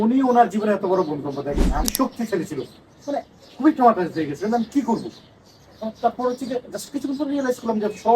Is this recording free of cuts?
no; 1 cut; at 1.7 s

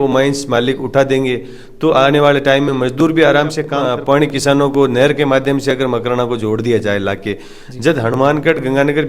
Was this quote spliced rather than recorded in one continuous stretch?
yes; 1 cut; at 3.7 s

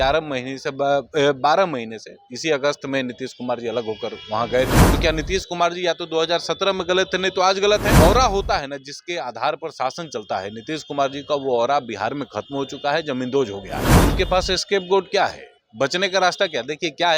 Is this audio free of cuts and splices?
no; 3 cuts; at 4.8 s, 7.9 s, 13.9 s

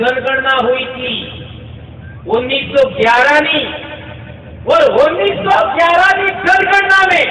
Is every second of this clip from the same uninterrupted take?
yes; 0 cuts

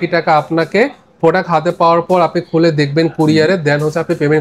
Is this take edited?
no; 0 cuts

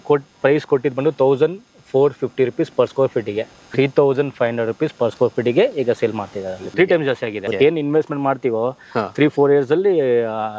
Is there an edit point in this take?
yes; 3 cuts; at 3.6 s, 6.6 s, 7.4 s

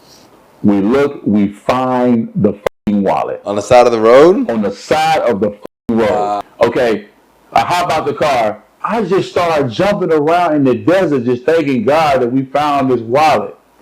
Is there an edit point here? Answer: yes; 1 cut; at 6.4 s

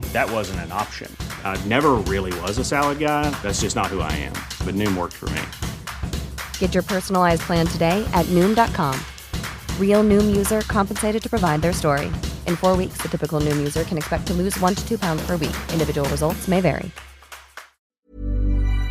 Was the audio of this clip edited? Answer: yes; 1 cut; at 17.9 s

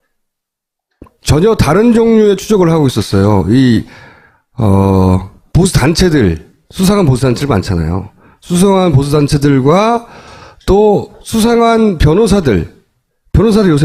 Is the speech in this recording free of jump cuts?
no; 1 cut; at 2.7 s

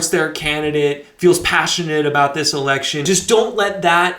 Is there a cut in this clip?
yes; 1 cut; at 3.0 s

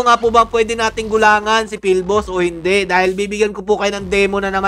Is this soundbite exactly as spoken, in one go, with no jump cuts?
yes; 0 cuts

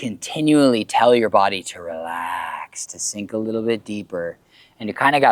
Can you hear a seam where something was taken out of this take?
no; 0 cuts

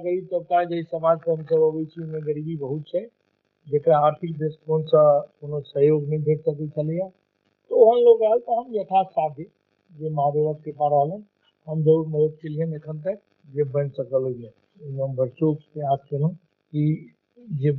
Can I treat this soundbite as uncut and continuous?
no; 2 cuts; at 13.4 s, 16.5 s

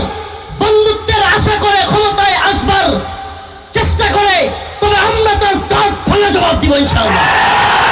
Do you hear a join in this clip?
no; 0 cuts

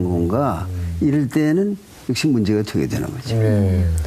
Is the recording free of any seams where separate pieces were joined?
no; 1 cut; at 1.1 s

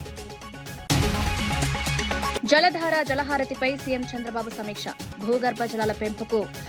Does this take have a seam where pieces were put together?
yes; 2 cuts; at 0.9 s, 2.4 s

